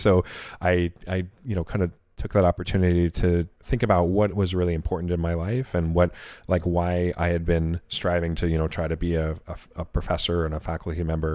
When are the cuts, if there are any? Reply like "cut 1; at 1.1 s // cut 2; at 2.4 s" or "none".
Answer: cut 1; at 3.6 s